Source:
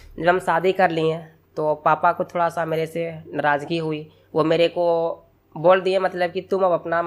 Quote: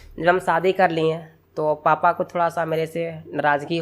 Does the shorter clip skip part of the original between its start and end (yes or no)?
no